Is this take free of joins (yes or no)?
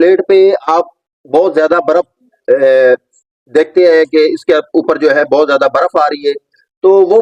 yes